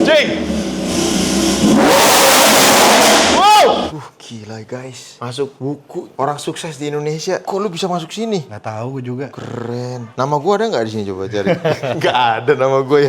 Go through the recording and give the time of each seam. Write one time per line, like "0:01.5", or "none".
0:03.9
0:07.4